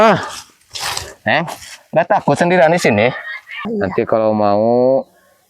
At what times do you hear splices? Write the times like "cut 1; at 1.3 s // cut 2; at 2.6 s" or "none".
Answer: cut 1; at 3.6 s